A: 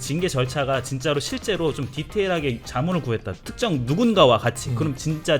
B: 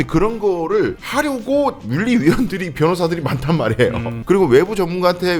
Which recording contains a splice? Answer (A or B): B